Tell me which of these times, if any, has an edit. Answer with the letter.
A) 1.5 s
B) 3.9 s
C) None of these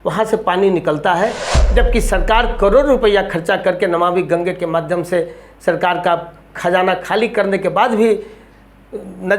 A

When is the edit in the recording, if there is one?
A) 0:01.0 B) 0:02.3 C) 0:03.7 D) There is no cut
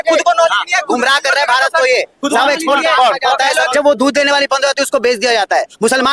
C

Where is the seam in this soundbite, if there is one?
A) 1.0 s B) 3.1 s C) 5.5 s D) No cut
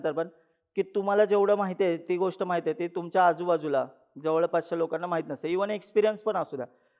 D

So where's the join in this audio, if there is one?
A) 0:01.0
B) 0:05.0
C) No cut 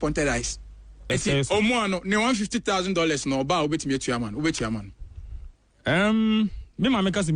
A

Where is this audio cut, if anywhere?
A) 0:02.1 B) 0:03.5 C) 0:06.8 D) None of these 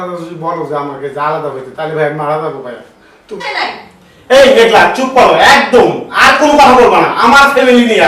B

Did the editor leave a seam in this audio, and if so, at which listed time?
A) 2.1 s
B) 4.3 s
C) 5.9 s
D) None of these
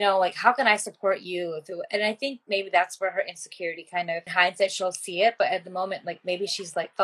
B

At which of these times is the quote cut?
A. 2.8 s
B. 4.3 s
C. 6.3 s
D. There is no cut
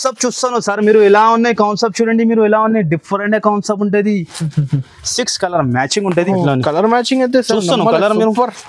C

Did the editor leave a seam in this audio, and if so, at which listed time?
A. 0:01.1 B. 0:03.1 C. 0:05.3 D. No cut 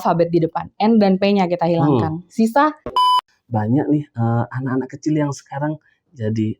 B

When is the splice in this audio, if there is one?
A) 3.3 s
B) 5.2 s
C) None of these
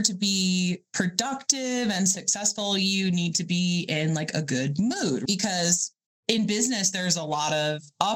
B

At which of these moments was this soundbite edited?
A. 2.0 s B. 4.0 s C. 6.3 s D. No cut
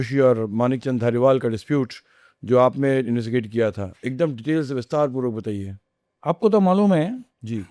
D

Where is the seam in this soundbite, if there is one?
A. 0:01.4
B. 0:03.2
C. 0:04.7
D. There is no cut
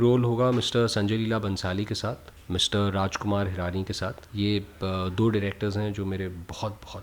D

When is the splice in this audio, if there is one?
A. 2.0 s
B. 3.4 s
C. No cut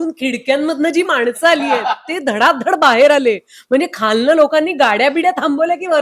A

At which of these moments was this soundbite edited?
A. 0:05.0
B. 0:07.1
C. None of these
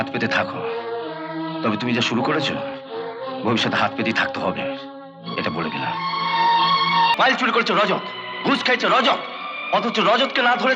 B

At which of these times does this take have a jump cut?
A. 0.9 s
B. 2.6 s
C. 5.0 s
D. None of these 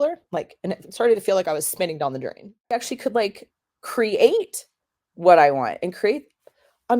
B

